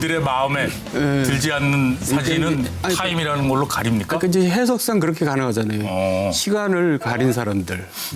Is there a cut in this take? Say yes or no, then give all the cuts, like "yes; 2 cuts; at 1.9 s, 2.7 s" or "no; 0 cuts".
no; 0 cuts